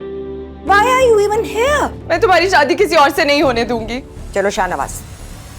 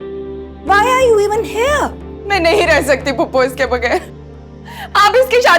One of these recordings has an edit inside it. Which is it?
first; 2 cuts; at 2.0 s, 4.2 s

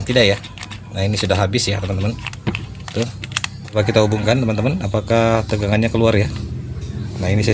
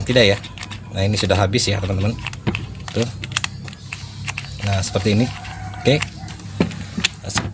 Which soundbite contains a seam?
first; 1 cut; at 3.7 s

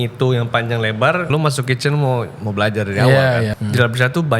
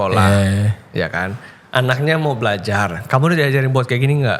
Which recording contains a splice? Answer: first; 2 cuts; at 1.3 s, 3.6 s

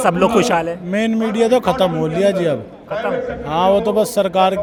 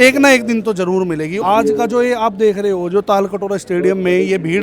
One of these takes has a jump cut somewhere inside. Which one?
second; 1 cut; at 1.4 s

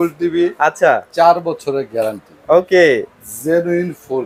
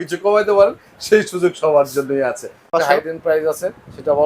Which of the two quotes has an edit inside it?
second; 1 cut; at 2.7 s

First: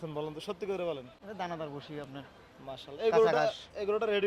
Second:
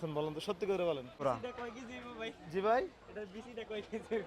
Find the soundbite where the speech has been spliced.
second; 1 cut; at 1.2 s

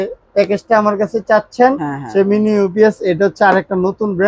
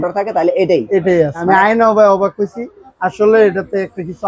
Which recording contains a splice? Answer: second; 1 cut; at 1.4 s

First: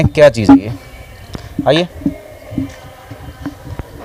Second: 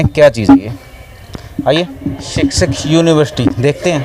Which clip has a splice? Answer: second; 1 cut; at 2.2 s

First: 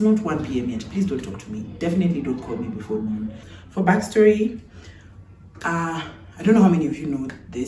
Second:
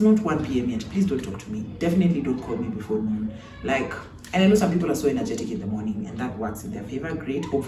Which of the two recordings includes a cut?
first; 1 cut; at 3.5 s

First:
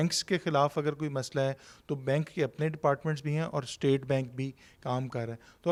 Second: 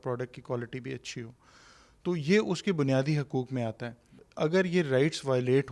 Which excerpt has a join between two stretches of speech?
second; 1 cut; at 4.2 s

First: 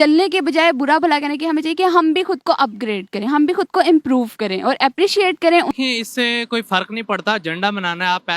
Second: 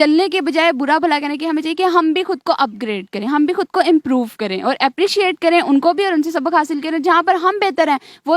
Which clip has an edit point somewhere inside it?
first; 1 cut; at 5.7 s

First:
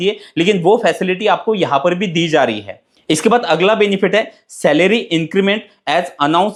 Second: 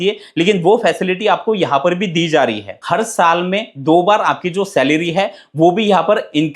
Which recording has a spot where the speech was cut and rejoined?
second; 1 cut; at 2.8 s

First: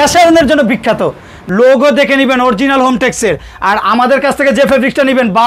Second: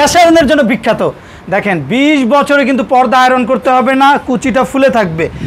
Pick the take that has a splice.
first; 1 cut; at 1.4 s

